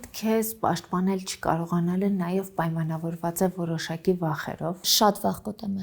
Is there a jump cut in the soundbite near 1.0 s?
no; 1 cut; at 4.9 s

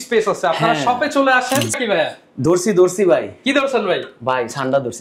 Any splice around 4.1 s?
no; 1 cut; at 1.7 s

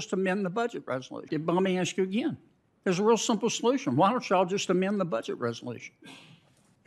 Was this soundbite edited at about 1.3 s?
yes; 1 cut; at 1.3 s

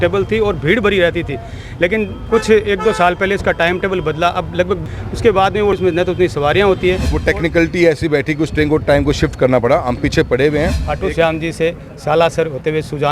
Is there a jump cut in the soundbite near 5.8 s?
yes; 4 cuts; at 4.9 s, 5.8 s, 7.1 s, 10.8 s

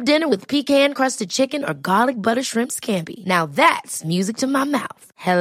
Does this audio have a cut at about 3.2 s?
no; 0 cuts

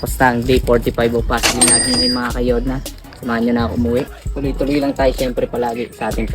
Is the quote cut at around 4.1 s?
yes; 1 cut; at 4.1 s

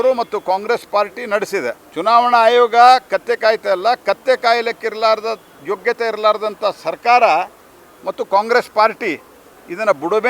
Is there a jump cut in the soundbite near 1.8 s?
yes; 1 cut; at 1.8 s

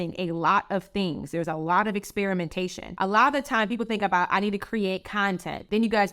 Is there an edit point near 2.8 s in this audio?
yes; 1 cut; at 2.8 s

